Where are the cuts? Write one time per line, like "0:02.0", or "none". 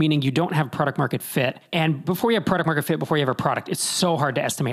0:02.0